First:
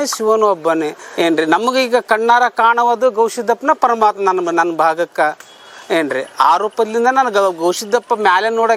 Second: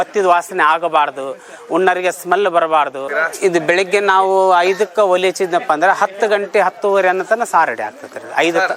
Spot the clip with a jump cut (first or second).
second